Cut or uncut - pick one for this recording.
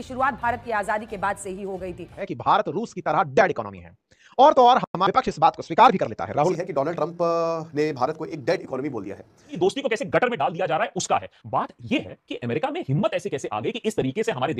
cut